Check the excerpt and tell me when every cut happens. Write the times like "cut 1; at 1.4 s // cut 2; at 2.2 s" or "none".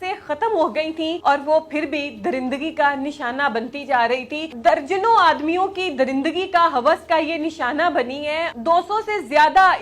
cut 1; at 1.2 s // cut 2; at 4.4 s // cut 3; at 8.5 s